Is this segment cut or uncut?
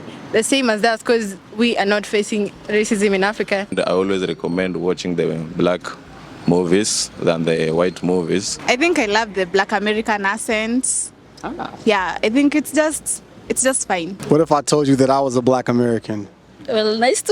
cut